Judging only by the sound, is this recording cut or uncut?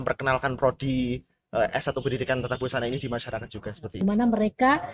cut